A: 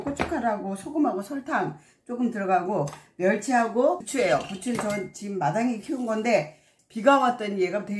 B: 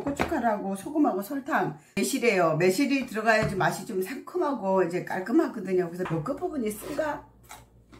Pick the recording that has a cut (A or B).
B